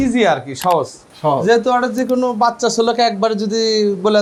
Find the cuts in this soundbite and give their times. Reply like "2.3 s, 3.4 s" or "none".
none